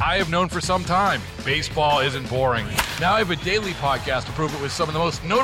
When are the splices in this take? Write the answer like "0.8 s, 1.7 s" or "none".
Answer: none